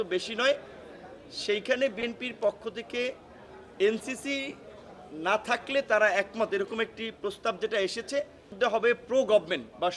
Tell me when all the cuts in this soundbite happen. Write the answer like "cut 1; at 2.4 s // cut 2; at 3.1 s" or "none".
cut 1; at 8.5 s